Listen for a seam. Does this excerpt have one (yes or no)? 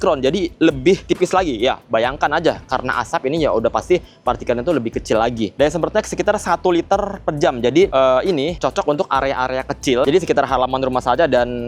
no